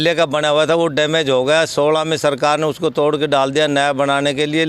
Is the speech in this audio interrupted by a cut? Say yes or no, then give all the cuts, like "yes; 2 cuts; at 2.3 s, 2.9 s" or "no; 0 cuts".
no; 0 cuts